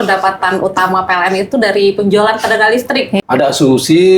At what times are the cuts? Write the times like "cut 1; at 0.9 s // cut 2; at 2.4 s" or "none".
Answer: cut 1; at 3.2 s